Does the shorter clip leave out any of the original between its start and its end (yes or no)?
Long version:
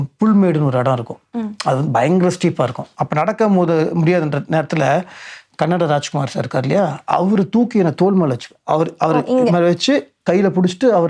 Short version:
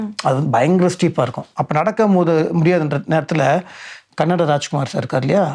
no